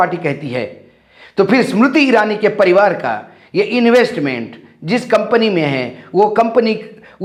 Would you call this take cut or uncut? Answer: uncut